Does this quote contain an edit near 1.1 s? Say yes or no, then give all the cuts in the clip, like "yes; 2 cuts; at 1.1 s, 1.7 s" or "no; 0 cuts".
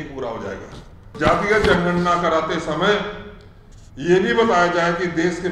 yes; 1 cut; at 1.1 s